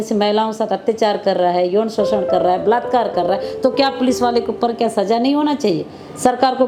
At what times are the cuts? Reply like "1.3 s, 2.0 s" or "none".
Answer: none

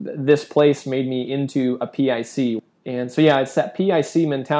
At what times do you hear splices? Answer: 2.6 s

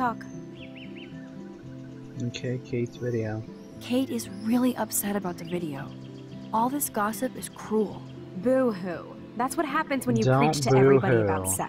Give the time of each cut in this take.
5.4 s

